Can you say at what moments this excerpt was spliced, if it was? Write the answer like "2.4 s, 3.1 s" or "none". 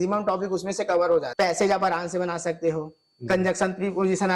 1.3 s